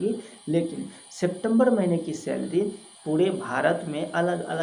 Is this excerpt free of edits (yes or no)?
no